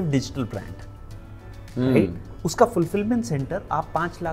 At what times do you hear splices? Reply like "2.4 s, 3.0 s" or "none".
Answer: none